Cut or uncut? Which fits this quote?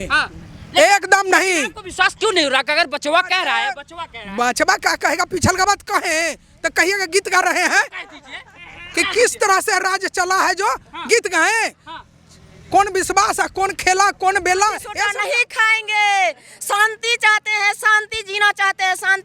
cut